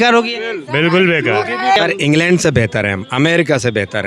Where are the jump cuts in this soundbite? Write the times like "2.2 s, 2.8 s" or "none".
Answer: 1.8 s